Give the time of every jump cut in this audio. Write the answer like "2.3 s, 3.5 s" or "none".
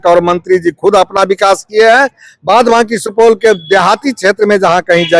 none